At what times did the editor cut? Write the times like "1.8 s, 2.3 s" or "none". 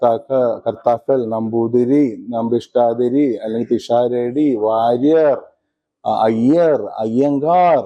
none